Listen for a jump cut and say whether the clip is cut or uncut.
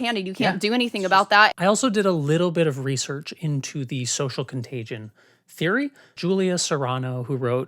cut